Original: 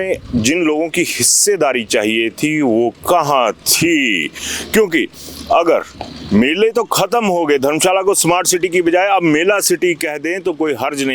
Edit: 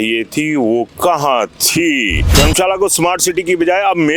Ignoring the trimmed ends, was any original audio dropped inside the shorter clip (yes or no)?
yes